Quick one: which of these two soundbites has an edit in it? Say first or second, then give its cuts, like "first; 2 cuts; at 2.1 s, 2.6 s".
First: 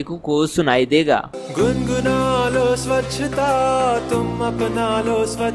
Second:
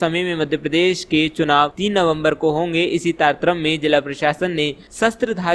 first; 1 cut; at 1.4 s